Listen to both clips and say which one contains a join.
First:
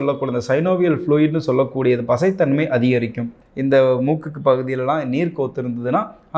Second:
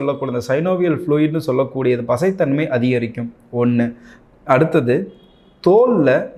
first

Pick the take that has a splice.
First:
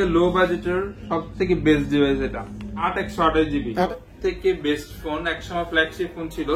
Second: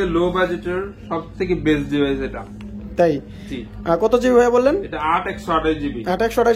first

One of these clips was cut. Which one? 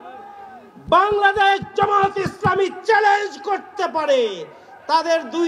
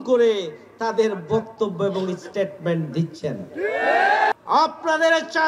second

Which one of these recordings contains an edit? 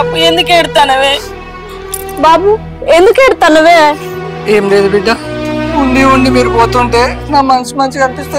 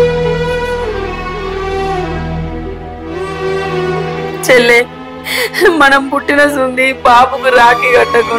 second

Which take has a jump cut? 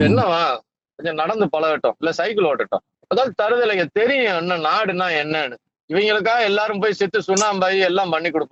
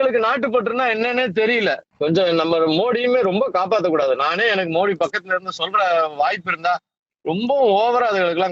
second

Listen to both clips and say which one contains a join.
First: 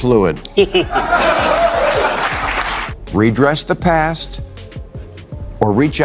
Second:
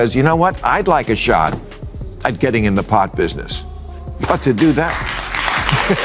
first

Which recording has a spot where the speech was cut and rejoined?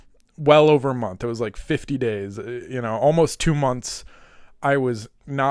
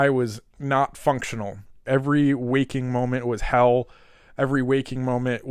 second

